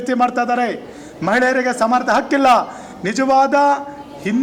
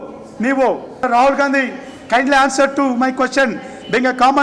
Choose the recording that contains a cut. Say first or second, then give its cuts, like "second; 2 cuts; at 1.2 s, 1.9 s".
second; 1 cut; at 1.0 s